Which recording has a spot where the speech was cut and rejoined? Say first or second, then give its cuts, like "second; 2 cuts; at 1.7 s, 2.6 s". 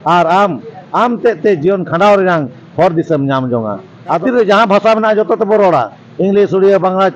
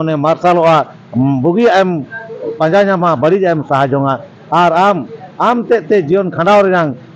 first; 1 cut; at 4.2 s